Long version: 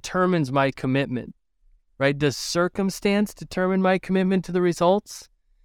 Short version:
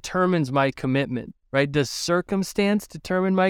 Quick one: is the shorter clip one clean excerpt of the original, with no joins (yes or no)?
no